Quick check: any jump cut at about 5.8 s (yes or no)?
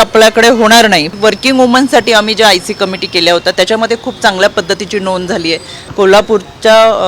yes